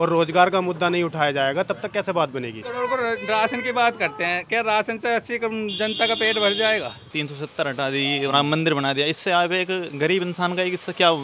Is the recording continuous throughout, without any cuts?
no; 2 cuts; at 2.6 s, 7.1 s

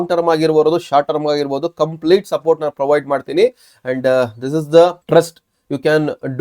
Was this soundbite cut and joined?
yes; 1 cut; at 5.0 s

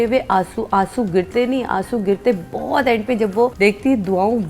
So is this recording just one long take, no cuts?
no; 1 cut; at 3.5 s

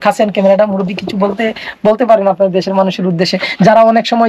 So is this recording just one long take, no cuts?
yes; 0 cuts

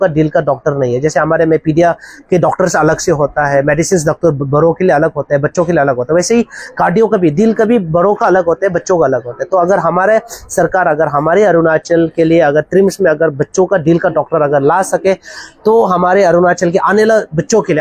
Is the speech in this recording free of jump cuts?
yes; 0 cuts

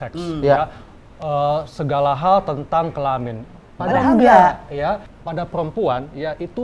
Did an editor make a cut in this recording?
yes; 1 cut; at 5.1 s

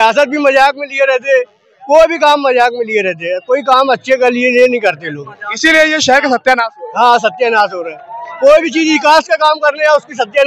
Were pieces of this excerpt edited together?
no; 0 cuts

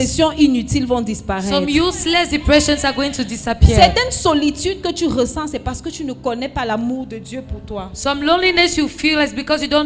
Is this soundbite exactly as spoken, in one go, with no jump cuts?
yes; 0 cuts

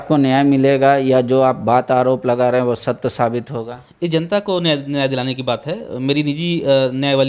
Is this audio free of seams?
yes; 0 cuts

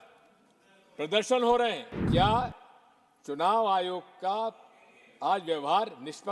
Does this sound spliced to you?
yes; 1 cut; at 1.9 s

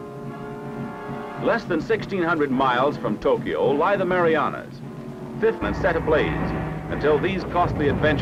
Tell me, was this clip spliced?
no; 0 cuts

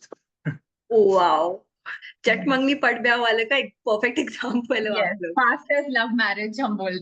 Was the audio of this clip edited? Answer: no; 0 cuts

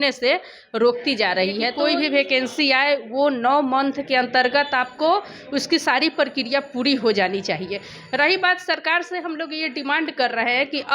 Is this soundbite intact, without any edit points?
no; 1 cut; at 1.7 s

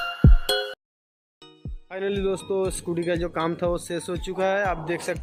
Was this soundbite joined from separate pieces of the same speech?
no; 0 cuts

